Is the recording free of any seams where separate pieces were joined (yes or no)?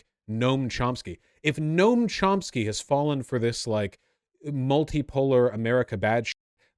yes